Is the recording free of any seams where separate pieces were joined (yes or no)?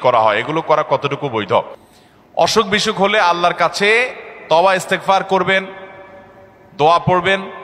yes